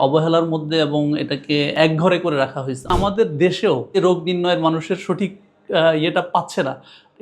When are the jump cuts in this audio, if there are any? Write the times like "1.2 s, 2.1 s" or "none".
1.7 s, 2.9 s, 4.0 s